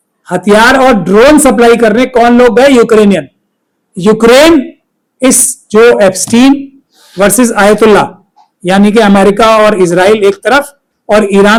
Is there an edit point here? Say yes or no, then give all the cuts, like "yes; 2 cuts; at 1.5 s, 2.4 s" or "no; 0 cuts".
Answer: no; 0 cuts